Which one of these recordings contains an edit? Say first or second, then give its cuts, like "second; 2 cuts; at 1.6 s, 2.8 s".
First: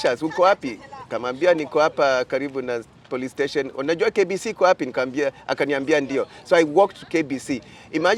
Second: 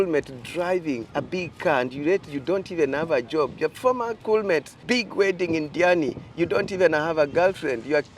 second; 3 cuts; at 1.0 s, 4.2 s, 4.7 s